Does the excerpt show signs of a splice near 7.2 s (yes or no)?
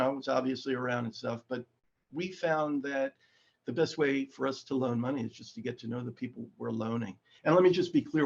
yes